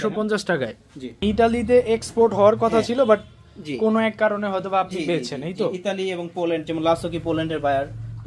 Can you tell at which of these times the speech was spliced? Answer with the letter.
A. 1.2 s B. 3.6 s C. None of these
A